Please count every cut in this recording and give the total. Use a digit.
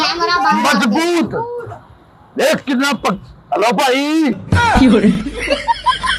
0